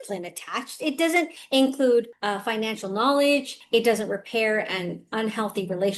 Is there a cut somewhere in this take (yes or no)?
no